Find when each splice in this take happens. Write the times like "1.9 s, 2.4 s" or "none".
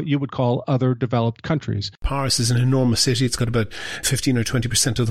2.0 s